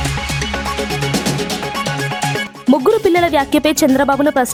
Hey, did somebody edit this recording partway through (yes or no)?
no